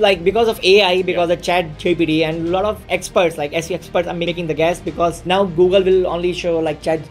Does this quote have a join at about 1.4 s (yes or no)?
no